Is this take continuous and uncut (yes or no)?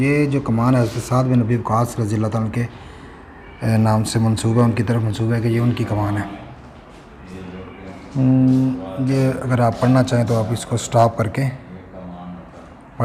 yes